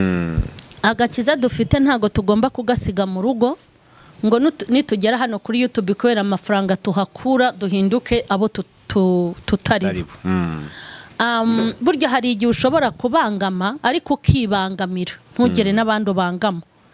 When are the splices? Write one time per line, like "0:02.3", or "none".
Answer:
none